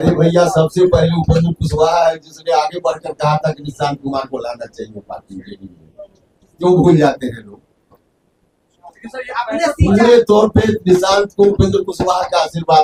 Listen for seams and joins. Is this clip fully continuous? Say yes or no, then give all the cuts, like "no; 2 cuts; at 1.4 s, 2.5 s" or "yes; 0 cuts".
yes; 0 cuts